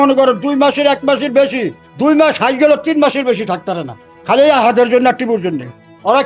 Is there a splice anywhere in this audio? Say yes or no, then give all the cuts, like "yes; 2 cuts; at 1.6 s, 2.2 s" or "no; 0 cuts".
no; 0 cuts